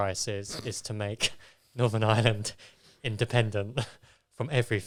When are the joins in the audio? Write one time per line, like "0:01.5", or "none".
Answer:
none